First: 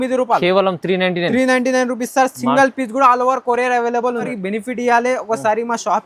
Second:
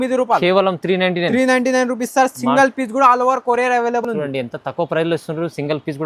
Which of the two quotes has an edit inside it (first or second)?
first